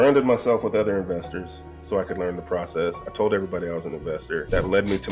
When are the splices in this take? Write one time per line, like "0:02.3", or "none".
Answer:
none